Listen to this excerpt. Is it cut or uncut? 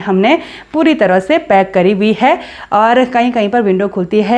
uncut